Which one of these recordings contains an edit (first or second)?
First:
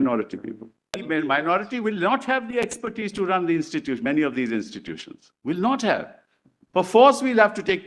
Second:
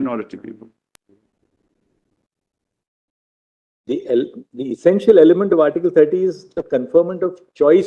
first